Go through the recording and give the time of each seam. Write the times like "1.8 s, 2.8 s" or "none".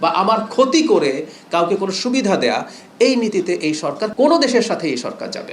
4.1 s

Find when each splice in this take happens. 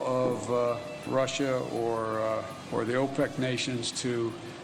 1.0 s, 2.6 s

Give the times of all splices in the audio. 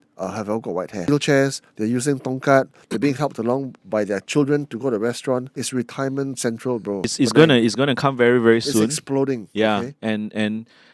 1.1 s, 5.6 s, 7.1 s

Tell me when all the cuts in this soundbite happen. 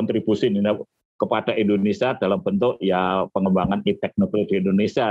none

